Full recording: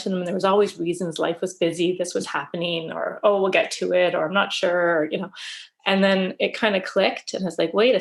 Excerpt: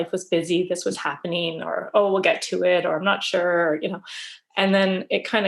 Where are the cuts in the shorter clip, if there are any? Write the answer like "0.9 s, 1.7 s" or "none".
none